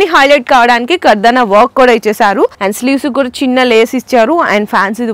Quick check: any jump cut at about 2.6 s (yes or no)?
yes